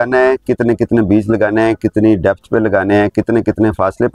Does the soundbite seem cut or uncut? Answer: uncut